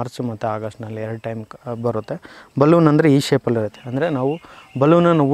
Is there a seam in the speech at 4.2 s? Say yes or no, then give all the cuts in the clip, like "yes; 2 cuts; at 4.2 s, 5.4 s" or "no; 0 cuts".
no; 0 cuts